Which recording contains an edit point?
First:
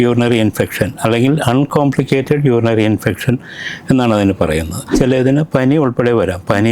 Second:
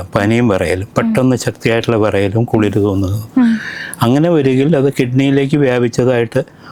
first; 1 cut; at 4.9 s

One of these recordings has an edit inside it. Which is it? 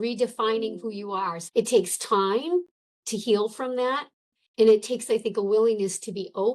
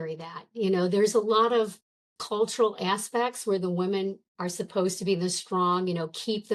first; 1 cut; at 1.4 s

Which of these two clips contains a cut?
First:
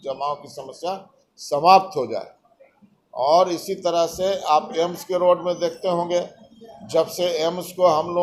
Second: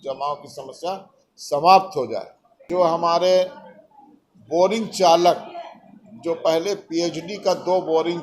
second; 1 cut; at 2.6 s

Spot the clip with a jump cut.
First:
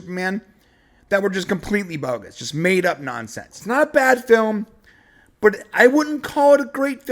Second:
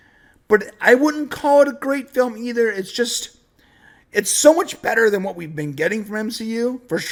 first; 1 cut; at 3.6 s

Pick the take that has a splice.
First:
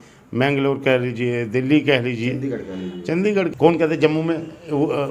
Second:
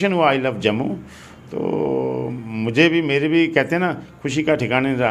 first; 1 cut; at 3.5 s

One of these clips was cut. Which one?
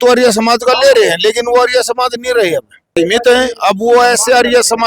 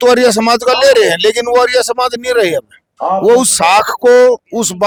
first; 1 cut; at 2.9 s

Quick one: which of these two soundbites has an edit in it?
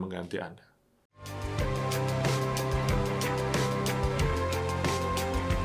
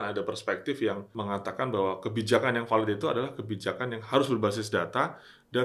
second; 1 cut; at 1.1 s

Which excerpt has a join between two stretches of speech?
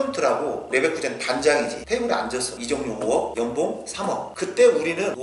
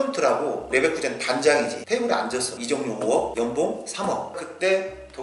second; 1 cut; at 4.3 s

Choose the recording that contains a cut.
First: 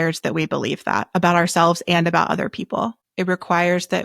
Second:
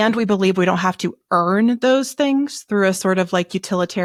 first; 1 cut; at 3.0 s

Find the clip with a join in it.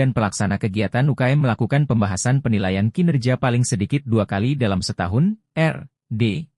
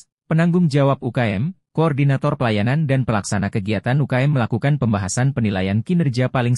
second; 1 cut; at 1.9 s

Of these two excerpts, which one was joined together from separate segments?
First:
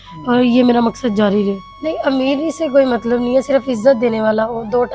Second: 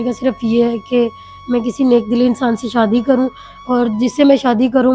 first; 1 cut; at 1.7 s

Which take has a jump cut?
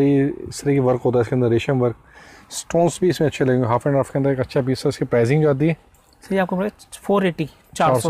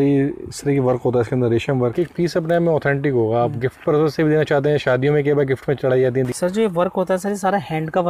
second; 2 cuts; at 1.9 s, 6.3 s

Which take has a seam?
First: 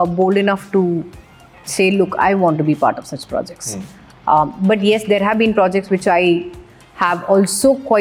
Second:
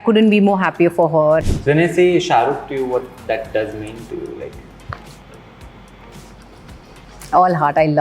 second; 1 cut; at 1.4 s

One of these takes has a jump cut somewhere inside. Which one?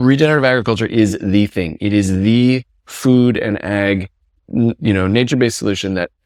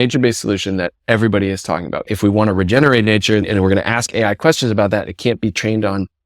second; 2 cuts; at 2.1 s, 3.4 s

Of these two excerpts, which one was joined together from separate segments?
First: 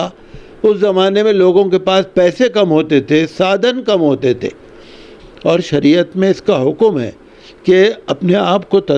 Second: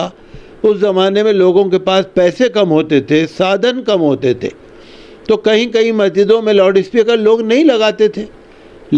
first; 1 cut; at 5.1 s

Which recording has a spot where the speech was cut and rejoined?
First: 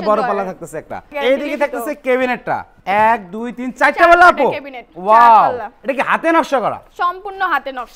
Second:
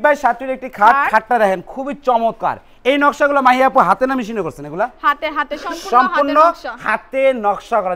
first; 3 cuts; at 1.1 s, 2.7 s, 6.9 s

